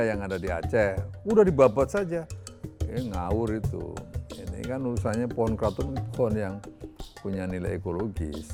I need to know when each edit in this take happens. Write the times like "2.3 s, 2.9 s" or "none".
none